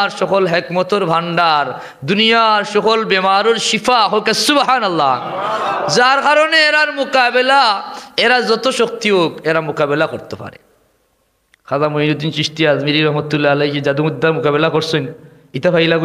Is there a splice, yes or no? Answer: no